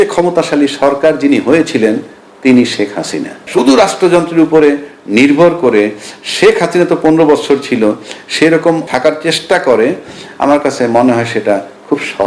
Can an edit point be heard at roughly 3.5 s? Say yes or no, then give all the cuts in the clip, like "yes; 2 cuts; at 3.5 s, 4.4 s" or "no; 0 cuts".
yes; 2 cuts; at 3.5 s, 8.9 s